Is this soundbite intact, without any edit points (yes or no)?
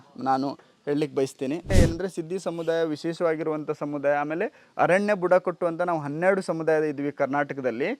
no